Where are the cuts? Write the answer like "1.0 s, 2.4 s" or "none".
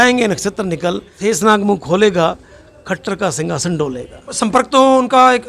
1.1 s, 4.3 s